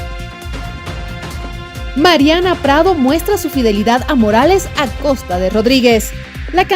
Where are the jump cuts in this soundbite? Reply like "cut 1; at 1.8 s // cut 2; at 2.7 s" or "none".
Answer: cut 1; at 1.0 s